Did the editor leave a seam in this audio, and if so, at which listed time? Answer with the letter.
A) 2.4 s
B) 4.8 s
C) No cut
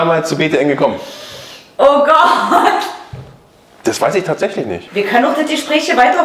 B